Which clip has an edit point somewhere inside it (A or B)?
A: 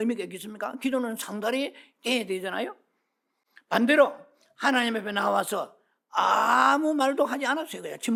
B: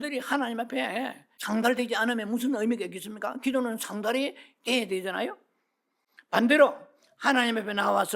B